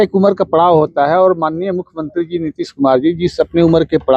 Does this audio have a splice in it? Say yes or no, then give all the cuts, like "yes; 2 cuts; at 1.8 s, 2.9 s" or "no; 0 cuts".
no; 0 cuts